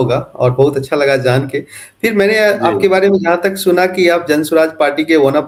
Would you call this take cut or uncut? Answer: uncut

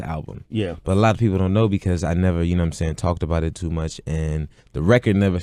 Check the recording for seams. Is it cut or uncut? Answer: uncut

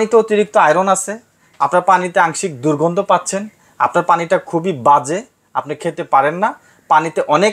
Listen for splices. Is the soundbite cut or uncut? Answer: uncut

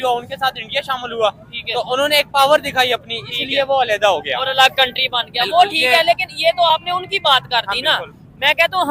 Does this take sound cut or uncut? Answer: uncut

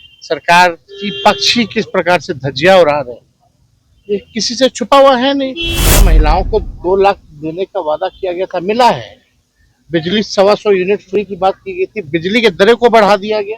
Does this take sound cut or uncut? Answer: cut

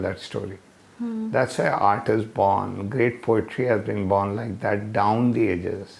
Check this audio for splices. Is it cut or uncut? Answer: uncut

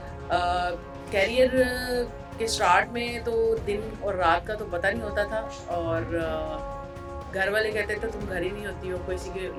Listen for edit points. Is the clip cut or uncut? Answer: uncut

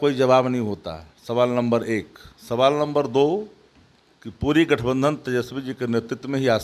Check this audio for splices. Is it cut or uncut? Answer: uncut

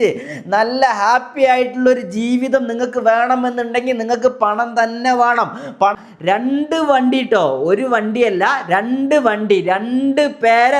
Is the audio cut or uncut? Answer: cut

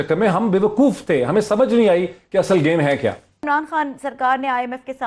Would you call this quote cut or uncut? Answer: cut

